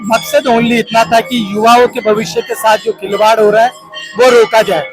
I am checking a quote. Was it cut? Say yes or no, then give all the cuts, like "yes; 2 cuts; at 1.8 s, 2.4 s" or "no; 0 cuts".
no; 0 cuts